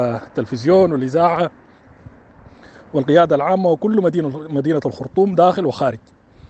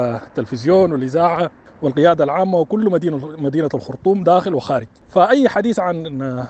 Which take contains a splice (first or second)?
second